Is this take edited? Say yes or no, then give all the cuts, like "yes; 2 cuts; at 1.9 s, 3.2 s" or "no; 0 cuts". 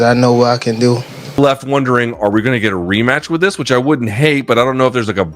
yes; 1 cut; at 1.4 s